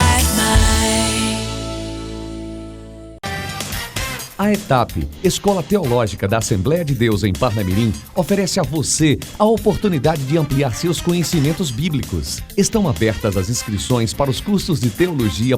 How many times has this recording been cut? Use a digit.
1